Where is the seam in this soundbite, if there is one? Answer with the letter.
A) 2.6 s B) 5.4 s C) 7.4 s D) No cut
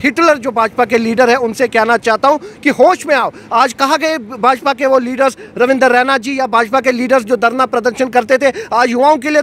D